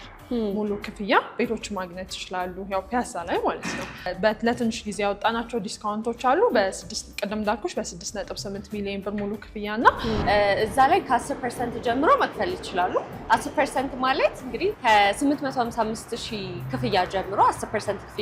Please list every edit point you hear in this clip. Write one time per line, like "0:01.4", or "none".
0:04.1
0:10.2